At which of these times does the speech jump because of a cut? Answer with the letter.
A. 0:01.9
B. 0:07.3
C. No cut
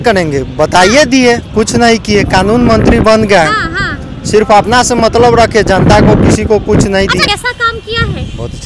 B